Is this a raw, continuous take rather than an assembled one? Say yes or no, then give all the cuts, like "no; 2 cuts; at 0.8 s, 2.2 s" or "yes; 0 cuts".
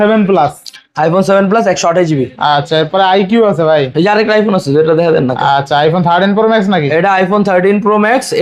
yes; 0 cuts